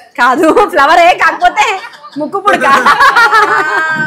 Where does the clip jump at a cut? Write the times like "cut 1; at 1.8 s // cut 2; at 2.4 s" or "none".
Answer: none